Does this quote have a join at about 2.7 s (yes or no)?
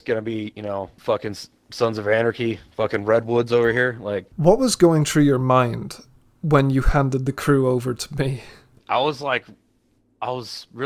no